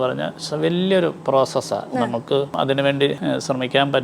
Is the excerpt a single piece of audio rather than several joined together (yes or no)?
no